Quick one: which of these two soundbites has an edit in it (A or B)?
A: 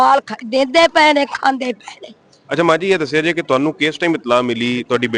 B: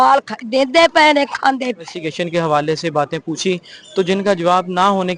B